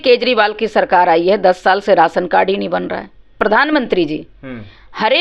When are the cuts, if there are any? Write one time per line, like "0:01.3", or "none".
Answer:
0:03.4